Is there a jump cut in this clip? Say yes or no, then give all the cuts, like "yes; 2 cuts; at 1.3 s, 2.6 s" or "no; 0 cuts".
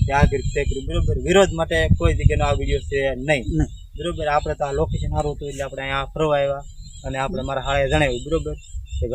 no; 0 cuts